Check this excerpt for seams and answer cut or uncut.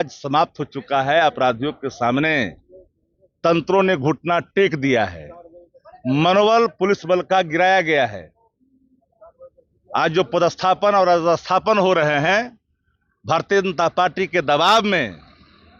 uncut